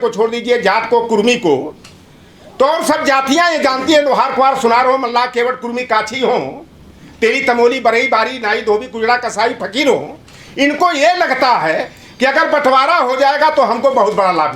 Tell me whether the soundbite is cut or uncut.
uncut